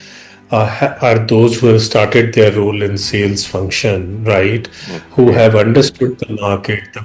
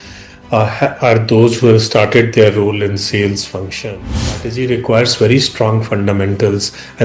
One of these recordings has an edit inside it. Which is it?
second; 1 cut; at 4.2 s

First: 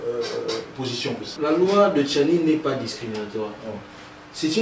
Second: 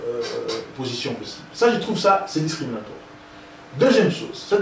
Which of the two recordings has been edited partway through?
first; 1 cut; at 1.3 s

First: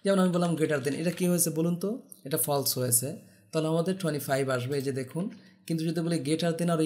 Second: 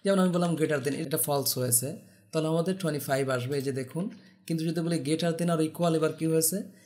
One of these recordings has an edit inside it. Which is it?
second; 1 cut; at 1.0 s

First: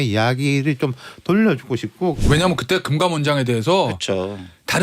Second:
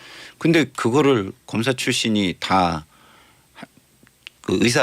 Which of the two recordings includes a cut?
first; 1 cut; at 2.2 s

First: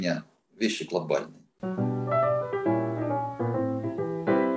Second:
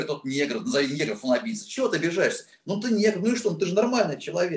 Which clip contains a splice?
first; 1 cut; at 1.4 s

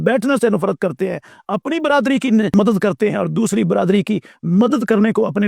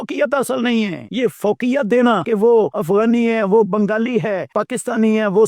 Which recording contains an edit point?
second; 3 cuts; at 1.0 s, 2.5 s, 4.5 s

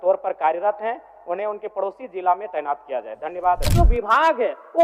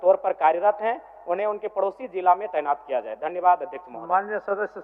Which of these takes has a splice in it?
first; 1 cut; at 3.7 s

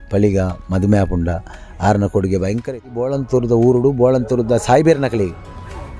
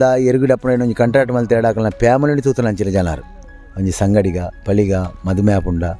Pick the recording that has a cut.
first; 1 cut; at 3.2 s

